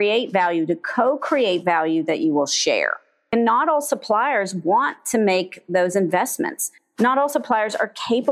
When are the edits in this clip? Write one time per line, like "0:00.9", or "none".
0:03.3